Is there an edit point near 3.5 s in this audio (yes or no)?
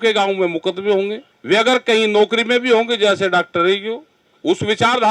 no